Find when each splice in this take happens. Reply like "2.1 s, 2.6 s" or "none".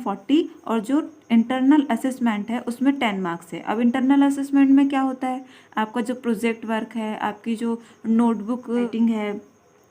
8.9 s